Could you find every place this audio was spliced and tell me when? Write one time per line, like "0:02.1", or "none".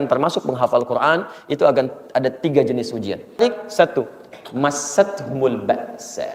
0:03.4